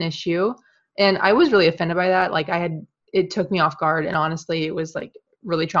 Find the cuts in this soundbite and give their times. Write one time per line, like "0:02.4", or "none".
none